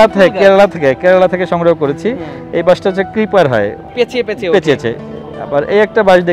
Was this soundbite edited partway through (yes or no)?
yes